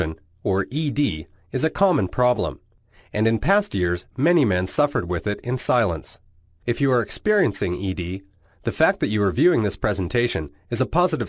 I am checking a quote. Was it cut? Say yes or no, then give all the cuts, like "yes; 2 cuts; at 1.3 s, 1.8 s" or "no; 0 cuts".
no; 0 cuts